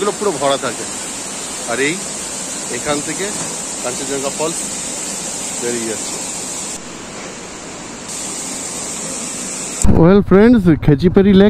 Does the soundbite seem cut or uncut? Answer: cut